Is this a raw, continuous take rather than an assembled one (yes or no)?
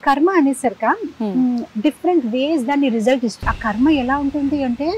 no